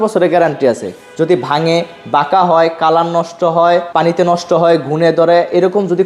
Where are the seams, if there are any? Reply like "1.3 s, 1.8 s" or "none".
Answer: 3.9 s